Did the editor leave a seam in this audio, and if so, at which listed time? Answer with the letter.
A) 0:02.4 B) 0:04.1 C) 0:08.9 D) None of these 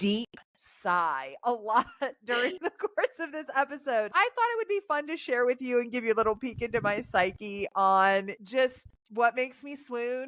B